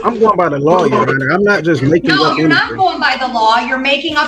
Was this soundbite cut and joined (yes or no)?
no